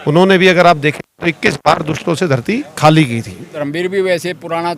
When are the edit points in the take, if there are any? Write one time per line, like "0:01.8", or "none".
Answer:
0:03.5

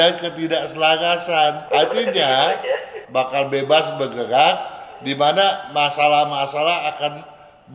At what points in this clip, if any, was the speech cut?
0:01.6
0:03.0

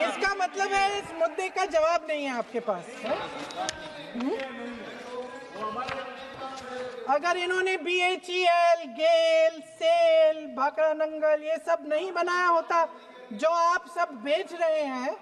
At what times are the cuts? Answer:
none

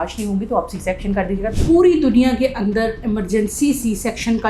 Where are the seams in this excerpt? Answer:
0:01.6

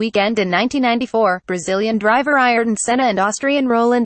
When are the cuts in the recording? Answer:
0:02.9

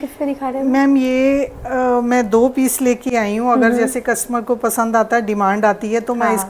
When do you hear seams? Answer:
none

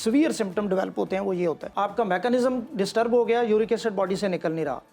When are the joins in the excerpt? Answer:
0:01.7

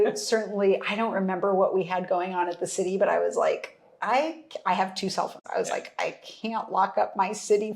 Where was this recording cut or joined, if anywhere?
0:05.4

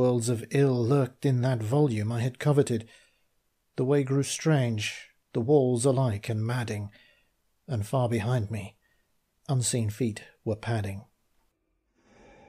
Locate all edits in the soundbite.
0:01.6

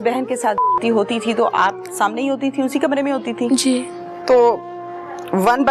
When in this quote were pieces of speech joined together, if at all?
0:04.1

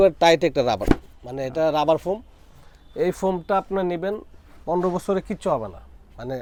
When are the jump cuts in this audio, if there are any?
none

